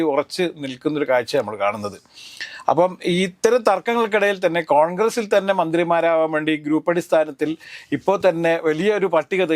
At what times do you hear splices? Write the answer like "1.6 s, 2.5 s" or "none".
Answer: none

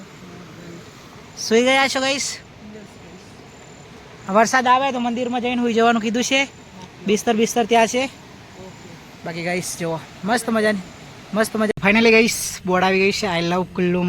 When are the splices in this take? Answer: 11.7 s

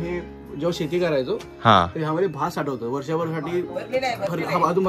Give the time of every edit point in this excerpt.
none

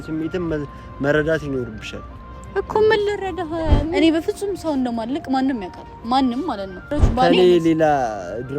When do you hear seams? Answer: 4.0 s, 7.0 s

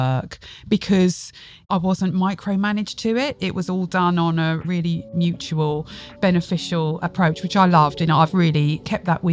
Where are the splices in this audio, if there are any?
1.5 s, 4.6 s, 7.0 s, 8.4 s

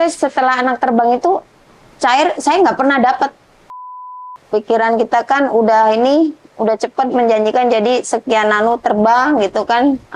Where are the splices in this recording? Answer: 4.0 s

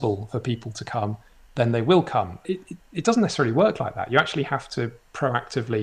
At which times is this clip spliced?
none

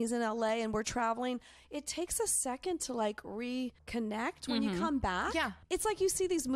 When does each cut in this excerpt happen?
5.6 s

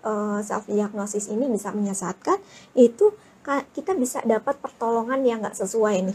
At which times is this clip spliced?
none

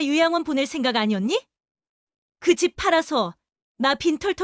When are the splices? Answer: none

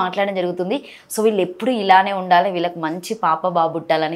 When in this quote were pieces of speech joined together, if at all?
none

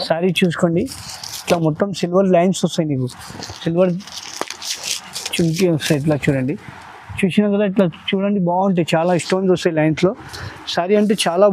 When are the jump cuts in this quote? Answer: none

